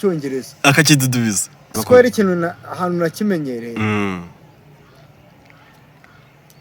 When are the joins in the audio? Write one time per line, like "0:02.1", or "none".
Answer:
0:01.7

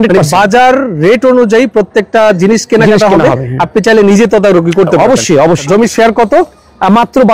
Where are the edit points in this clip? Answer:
0:05.6

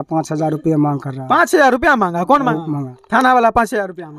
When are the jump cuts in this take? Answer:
0:02.9

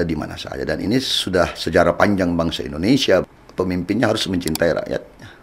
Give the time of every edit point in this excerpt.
0:03.2

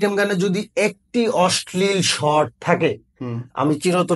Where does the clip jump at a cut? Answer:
none

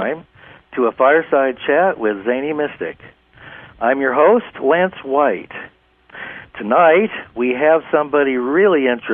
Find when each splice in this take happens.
0:04.0

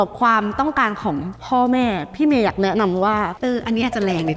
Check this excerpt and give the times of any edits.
0:03.3

